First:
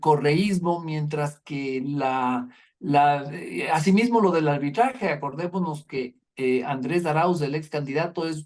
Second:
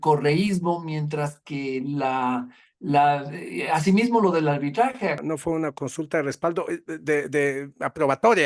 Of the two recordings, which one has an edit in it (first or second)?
second